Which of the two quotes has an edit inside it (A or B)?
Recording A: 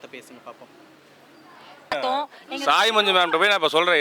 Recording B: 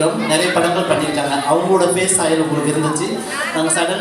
A